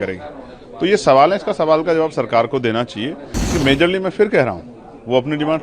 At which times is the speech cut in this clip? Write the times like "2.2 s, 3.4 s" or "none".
3.3 s